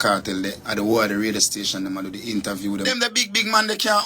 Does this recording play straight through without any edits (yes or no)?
no